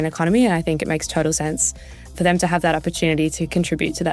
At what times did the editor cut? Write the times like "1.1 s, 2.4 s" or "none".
2.2 s